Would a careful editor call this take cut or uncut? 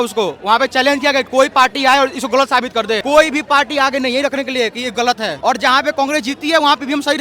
cut